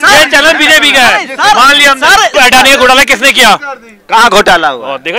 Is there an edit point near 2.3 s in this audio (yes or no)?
yes